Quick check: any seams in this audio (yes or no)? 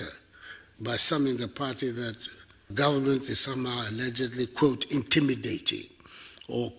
no